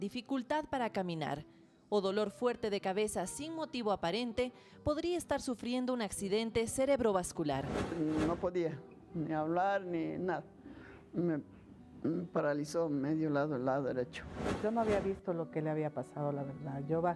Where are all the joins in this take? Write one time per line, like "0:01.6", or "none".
0:07.9